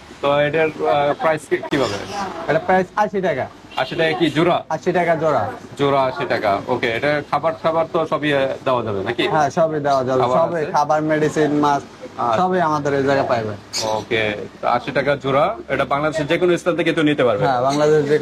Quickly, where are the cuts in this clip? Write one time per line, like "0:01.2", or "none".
none